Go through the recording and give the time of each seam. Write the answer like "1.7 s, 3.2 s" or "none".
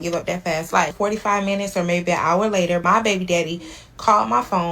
0.9 s, 2.8 s

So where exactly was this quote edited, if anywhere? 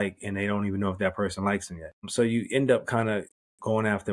2.1 s

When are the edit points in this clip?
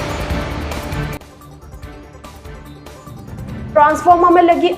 2.9 s

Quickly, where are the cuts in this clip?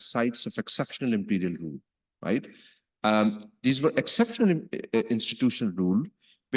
none

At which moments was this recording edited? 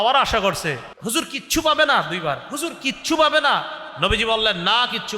0.9 s

